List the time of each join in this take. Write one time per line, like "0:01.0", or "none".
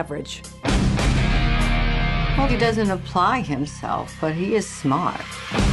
0:02.6